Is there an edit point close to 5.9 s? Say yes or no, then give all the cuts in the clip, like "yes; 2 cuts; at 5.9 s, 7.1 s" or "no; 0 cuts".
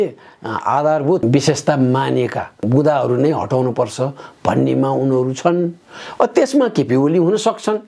no; 2 cuts; at 1.2 s, 2.6 s